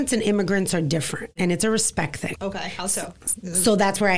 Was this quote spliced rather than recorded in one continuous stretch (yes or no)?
yes